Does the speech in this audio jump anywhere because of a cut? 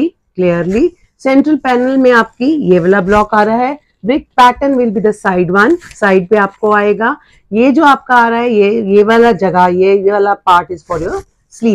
no; 0 cuts

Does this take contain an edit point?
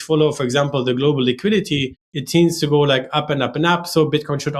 no; 0 cuts

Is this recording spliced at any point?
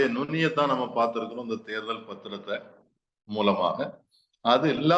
no; 0 cuts

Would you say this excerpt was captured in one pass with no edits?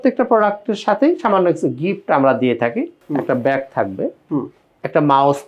no; 1 cut; at 3.0 s

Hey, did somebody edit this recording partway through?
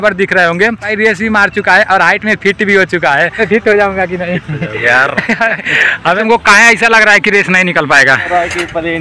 yes; 4 cuts; at 0.9 s, 3.3 s, 6.2 s, 8.3 s

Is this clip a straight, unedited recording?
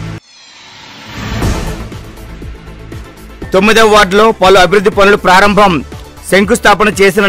yes; 0 cuts

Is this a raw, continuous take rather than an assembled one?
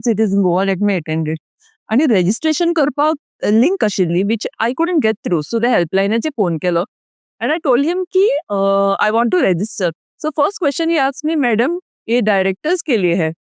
yes; 0 cuts

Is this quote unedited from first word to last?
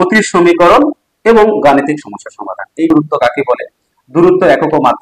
no; 1 cut; at 2.9 s

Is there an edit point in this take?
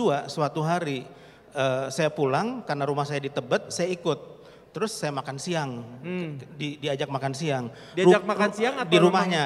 no; 0 cuts

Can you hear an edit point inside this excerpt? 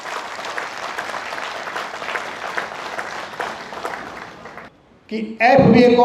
yes; 1 cut; at 4.7 s

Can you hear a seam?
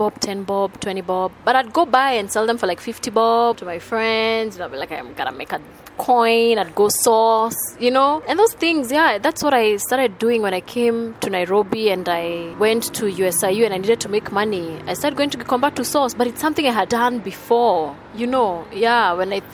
no; 0 cuts

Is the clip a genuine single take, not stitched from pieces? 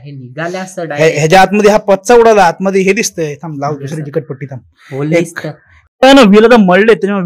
no; 1 cut; at 5.8 s

